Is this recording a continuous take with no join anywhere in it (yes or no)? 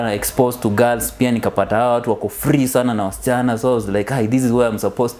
yes